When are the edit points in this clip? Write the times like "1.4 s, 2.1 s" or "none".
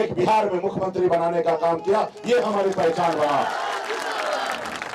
none